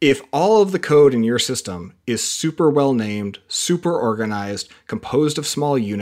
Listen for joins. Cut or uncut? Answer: uncut